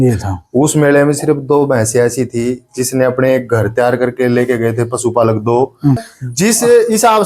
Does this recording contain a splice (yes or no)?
yes